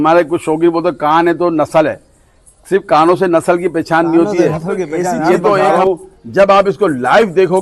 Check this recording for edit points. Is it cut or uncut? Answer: cut